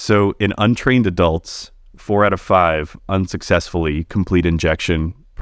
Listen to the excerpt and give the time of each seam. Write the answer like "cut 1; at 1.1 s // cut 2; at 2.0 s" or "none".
none